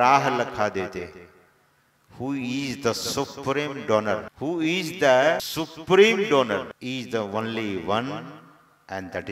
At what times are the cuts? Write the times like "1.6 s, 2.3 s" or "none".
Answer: 4.3 s, 5.5 s, 6.7 s